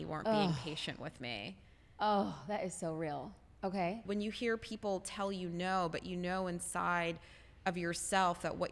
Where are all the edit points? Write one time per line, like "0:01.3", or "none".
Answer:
0:04.0